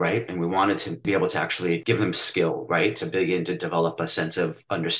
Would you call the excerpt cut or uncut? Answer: cut